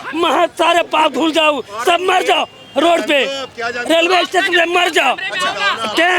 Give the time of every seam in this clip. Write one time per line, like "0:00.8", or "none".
none